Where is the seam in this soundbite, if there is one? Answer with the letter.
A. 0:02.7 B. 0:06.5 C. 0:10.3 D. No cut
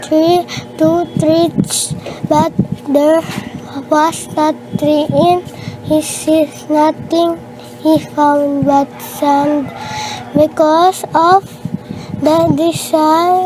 B